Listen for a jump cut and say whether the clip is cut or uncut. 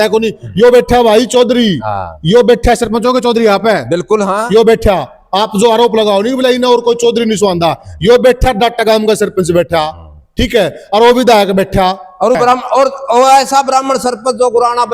cut